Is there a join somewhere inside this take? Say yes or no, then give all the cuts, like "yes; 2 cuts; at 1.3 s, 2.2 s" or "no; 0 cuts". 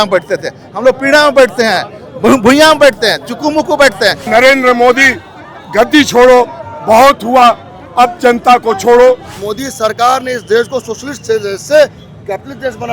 yes; 2 cuts; at 4.2 s, 9.3 s